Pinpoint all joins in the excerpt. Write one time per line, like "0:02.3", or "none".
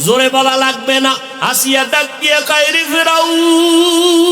0:01.3